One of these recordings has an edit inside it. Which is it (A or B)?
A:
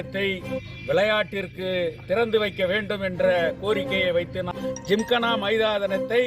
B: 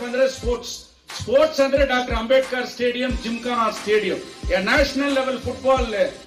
A